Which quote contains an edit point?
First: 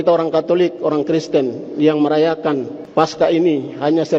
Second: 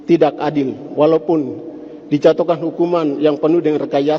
first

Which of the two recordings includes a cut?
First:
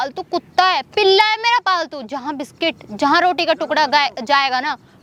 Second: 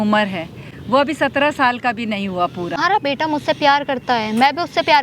second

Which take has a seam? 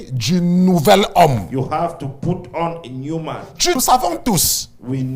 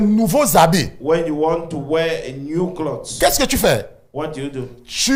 first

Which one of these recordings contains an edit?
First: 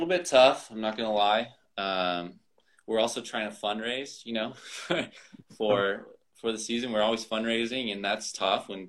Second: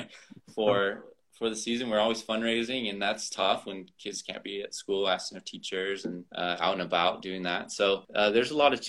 second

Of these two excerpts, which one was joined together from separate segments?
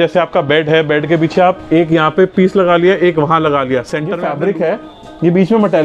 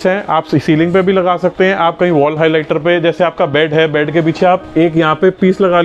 first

